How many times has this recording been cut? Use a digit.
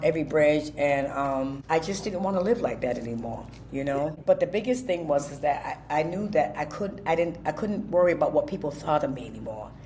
2